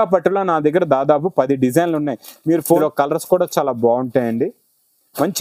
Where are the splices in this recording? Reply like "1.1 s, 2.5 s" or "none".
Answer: 2.8 s